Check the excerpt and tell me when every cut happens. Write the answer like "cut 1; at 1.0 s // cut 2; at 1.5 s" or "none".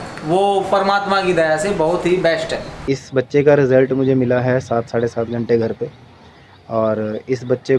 cut 1; at 2.8 s